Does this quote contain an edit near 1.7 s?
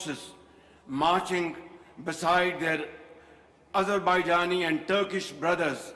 no; 0 cuts

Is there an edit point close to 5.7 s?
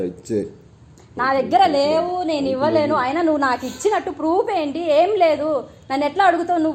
no; 0 cuts

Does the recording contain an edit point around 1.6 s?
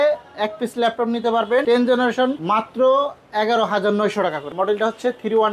yes; 3 cuts; at 1.6 s, 2.4 s, 4.5 s

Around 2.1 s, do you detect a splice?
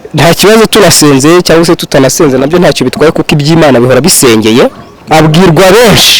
no; 1 cut; at 4.9 s

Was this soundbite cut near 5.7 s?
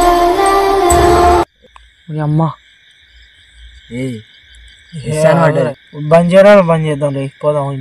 yes; 1 cut; at 5.7 s

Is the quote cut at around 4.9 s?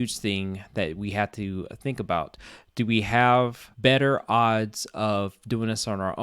no; 1 cut; at 3.6 s

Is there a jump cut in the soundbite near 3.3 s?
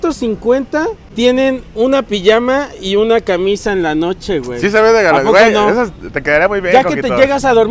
no; 1 cut; at 1.0 s

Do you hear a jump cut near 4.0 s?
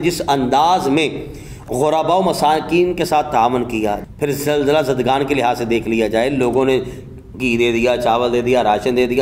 yes; 1 cut; at 4.0 s

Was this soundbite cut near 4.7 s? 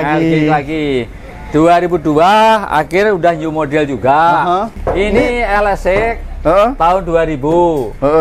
yes; 1 cut; at 4.7 s

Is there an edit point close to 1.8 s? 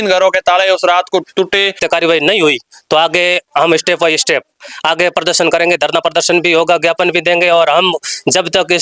yes; 1 cut; at 1.8 s

